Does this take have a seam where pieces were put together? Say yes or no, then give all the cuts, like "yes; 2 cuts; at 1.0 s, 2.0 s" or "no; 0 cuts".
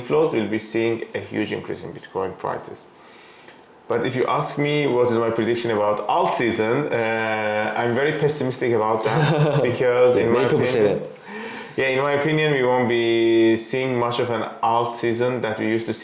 no; 0 cuts